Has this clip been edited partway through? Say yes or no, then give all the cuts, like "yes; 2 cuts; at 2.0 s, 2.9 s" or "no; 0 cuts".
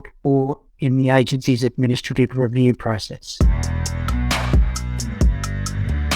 yes; 1 cut; at 3.3 s